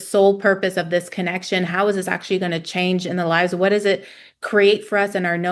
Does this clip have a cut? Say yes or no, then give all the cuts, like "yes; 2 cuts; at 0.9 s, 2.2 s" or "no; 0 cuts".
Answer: no; 0 cuts